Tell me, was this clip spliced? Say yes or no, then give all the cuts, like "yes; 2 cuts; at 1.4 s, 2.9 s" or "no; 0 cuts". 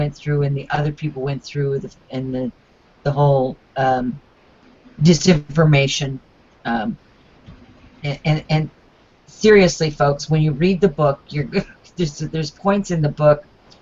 yes; 1 cut; at 2.6 s